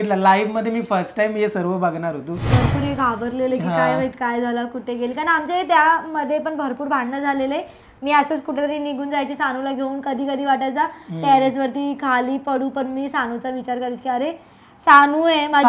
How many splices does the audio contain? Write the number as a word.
one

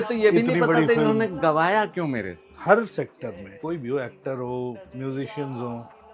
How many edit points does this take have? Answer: one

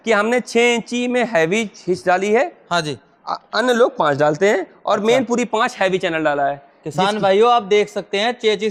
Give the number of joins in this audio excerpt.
zero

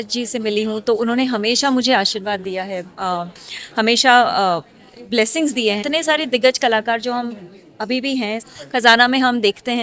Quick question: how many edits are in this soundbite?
two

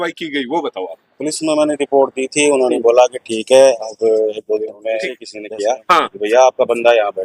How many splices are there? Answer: one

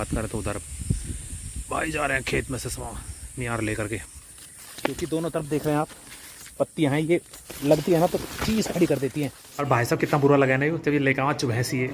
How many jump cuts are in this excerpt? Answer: two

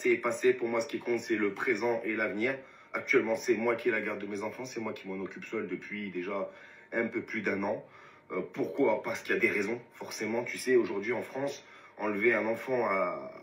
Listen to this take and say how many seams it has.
zero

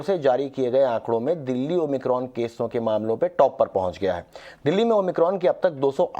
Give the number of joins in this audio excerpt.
one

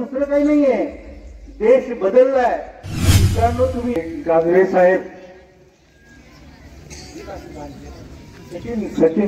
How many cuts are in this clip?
one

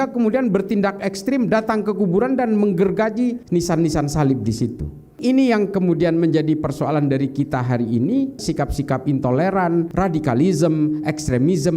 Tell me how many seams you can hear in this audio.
four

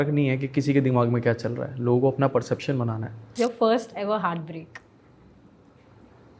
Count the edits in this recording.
one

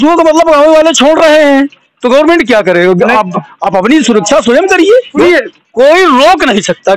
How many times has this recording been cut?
one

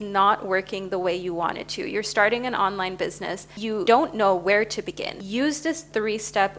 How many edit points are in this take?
two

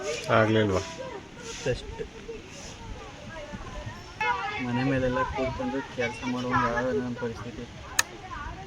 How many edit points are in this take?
one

